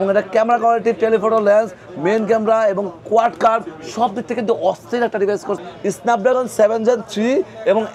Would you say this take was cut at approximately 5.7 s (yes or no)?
yes